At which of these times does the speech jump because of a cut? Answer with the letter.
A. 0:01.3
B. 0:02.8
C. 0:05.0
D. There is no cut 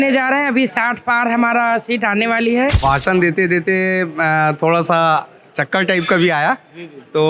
B